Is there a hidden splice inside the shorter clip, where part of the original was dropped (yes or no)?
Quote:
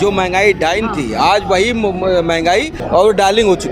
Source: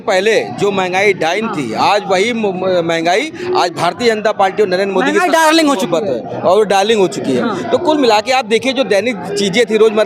yes